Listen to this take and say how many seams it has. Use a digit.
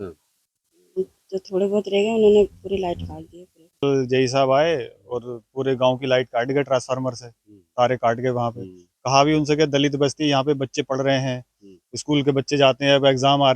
1